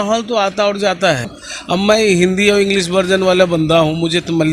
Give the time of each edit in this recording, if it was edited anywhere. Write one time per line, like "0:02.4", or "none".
0:01.3